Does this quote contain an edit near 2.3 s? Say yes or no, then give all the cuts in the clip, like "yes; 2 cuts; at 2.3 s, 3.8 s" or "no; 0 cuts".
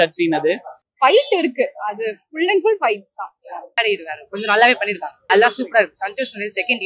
no; 3 cuts; at 0.9 s, 3.7 s, 5.1 s